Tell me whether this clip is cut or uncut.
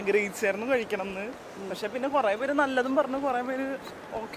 uncut